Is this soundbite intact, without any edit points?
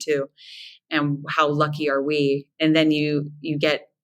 no; 1 cut; at 2.5 s

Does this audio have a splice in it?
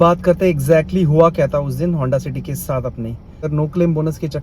yes; 1 cut; at 3.5 s

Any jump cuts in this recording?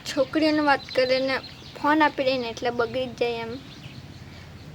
no; 0 cuts

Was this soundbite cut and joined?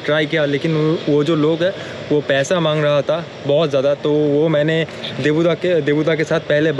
no; 0 cuts

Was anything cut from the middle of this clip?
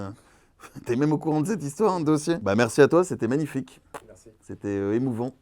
yes; 1 cut; at 2.4 s

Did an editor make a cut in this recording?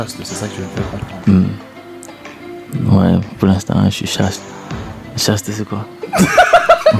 no; 0 cuts

